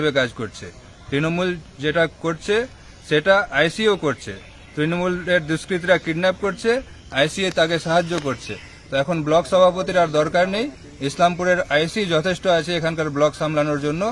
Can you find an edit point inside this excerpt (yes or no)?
no